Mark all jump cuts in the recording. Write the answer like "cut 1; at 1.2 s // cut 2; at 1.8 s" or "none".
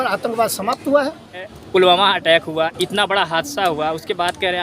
cut 1; at 1.4 s